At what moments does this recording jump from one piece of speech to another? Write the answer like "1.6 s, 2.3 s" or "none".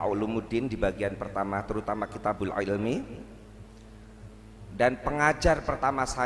none